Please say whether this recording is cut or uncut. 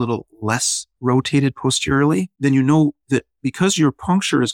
cut